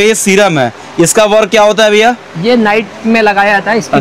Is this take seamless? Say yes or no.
yes